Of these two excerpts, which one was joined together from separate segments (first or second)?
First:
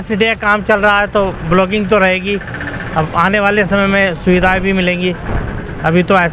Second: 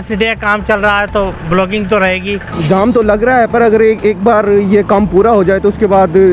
second